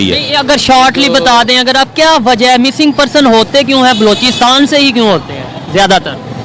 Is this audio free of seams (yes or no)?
yes